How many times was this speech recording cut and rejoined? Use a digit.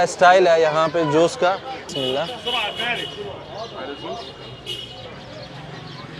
1